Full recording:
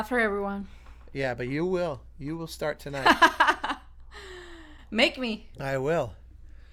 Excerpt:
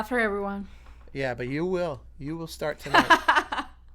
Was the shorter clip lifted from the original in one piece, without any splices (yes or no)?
no